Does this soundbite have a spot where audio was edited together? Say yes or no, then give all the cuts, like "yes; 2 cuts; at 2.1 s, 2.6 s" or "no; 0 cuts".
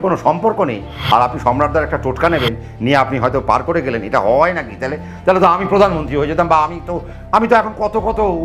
no; 0 cuts